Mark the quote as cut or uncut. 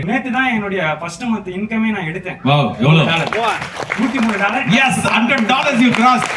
uncut